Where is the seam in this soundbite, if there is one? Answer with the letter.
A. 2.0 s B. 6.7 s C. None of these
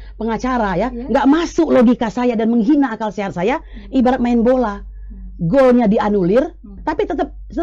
B